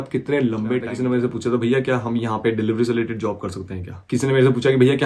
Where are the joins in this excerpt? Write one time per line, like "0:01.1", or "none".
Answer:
0:00.9
0:03.9